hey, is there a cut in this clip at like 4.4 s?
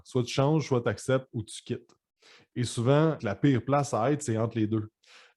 no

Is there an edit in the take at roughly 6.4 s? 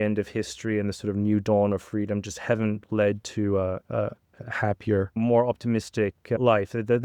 yes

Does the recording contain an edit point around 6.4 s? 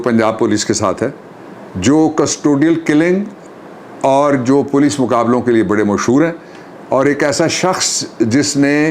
no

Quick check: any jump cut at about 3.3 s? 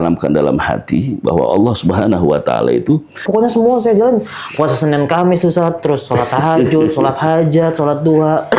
yes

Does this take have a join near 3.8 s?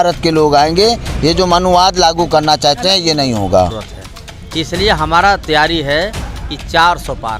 yes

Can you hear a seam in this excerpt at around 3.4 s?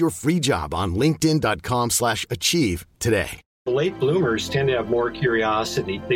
yes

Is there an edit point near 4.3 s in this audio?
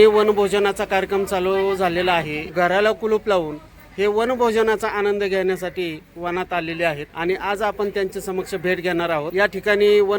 no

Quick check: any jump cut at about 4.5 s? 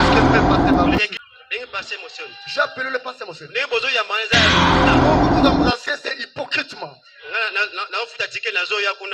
yes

